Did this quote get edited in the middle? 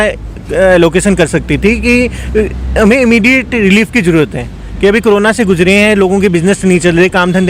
no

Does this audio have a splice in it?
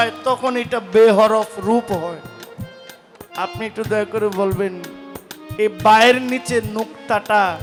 no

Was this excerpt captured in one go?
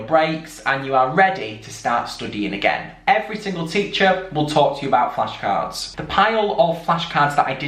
no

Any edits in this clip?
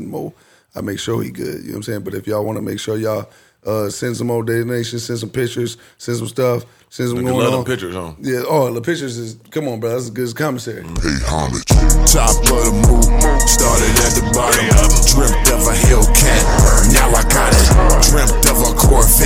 yes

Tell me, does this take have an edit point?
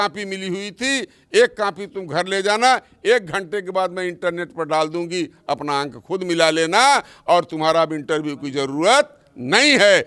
no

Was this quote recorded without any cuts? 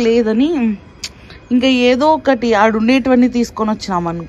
yes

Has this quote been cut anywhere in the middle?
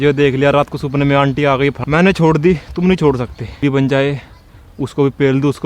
yes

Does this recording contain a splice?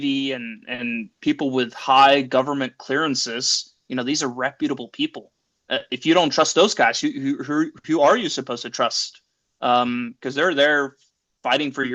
no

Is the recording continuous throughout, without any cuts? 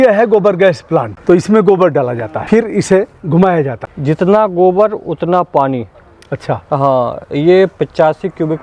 no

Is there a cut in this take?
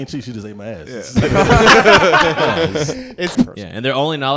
yes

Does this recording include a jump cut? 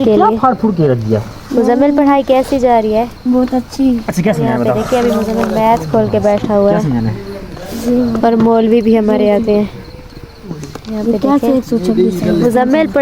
no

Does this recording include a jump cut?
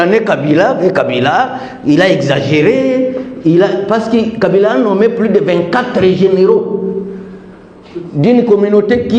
no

